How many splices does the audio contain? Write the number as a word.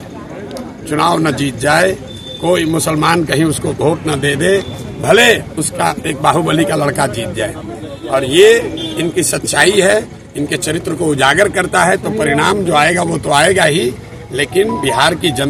zero